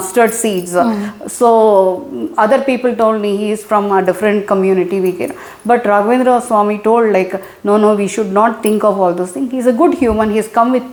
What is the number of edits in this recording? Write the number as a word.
zero